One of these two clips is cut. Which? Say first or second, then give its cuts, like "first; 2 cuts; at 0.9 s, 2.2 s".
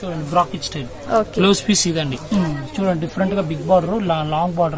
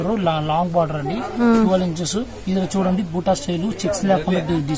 first; 1 cut; at 2.3 s